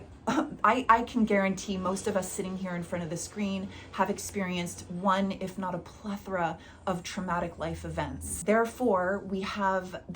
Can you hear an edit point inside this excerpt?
yes; 1 cut; at 8.3 s

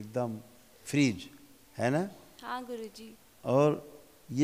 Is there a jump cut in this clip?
no; 0 cuts

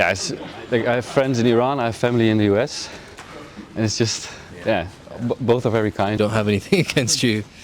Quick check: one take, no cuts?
no; 1 cut; at 6.2 s

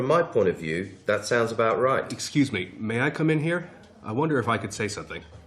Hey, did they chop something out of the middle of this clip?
yes; 1 cut; at 2.2 s

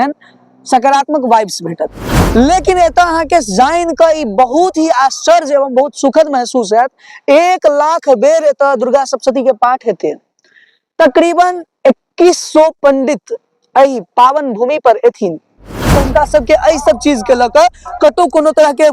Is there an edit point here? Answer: yes; 2 cuts; at 2.1 s, 15.9 s

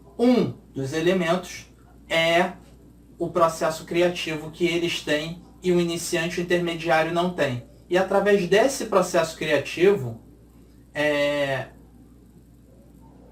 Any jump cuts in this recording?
no; 0 cuts

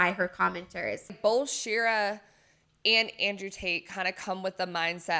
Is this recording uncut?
no; 1 cut; at 1.1 s

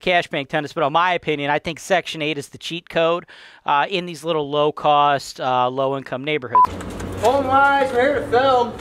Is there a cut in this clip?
yes; 1 cut; at 6.5 s

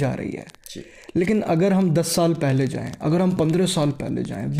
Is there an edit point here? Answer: no; 0 cuts

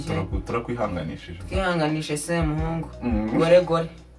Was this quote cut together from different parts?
no; 0 cuts

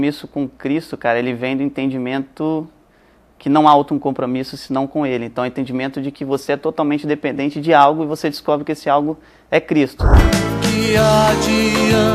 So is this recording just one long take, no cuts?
no; 1 cut; at 10.1 s

